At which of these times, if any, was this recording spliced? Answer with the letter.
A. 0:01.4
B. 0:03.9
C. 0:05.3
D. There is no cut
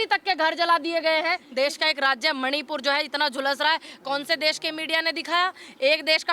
A